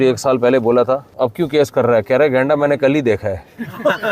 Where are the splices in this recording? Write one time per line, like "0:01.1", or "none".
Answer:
0:01.1